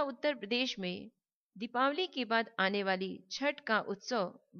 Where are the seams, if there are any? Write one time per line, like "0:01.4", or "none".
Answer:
0:00.9